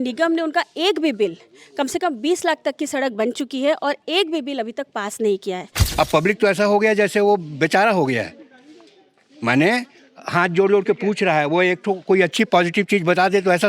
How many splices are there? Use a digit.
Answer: 1